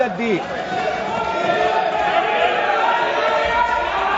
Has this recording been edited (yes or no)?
no